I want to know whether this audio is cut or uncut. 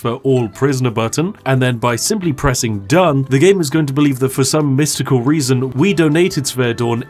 uncut